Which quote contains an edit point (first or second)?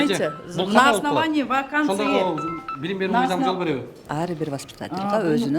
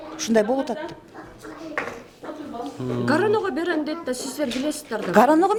first